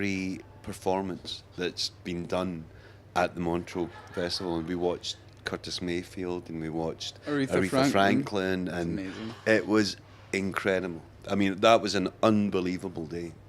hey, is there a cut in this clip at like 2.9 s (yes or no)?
no